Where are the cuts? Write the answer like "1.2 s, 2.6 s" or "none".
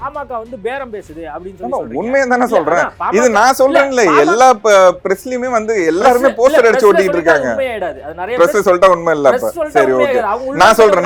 none